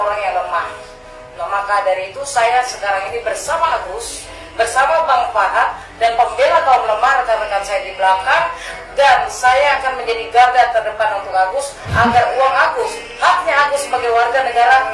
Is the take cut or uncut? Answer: uncut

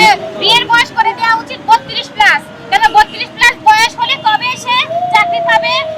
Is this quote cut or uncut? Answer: uncut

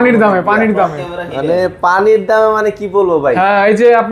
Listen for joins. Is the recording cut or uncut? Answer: uncut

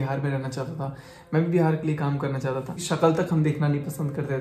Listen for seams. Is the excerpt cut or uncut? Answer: cut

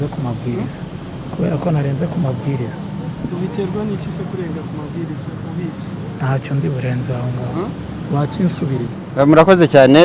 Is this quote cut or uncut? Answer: cut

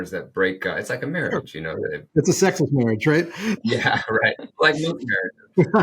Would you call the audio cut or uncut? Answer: cut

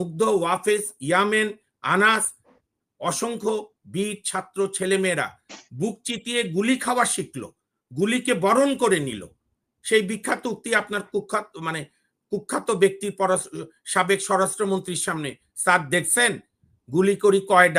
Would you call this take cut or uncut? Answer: uncut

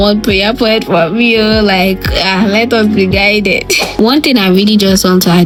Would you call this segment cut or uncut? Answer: uncut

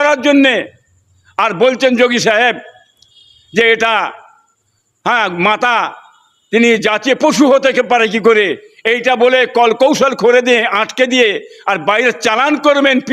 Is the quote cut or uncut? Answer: uncut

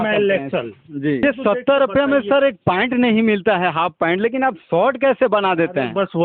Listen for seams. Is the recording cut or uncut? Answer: cut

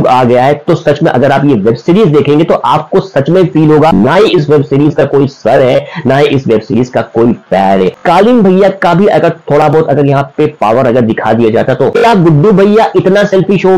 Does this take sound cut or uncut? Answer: cut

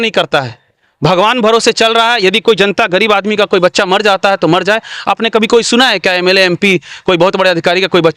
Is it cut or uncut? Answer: uncut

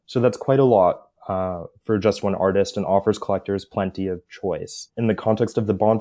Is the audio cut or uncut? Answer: uncut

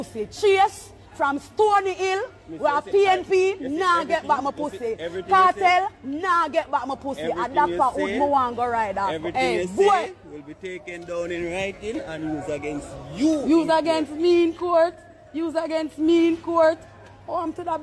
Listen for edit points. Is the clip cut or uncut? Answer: uncut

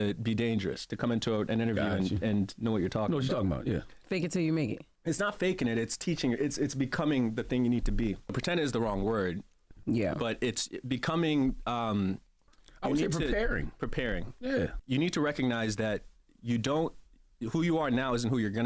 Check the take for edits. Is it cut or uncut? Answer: cut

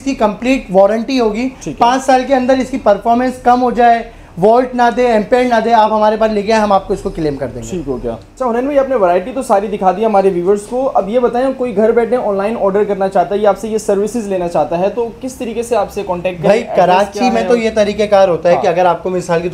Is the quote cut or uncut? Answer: uncut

